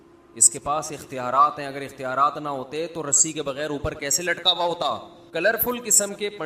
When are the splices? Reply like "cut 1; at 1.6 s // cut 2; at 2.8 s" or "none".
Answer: cut 1; at 5.2 s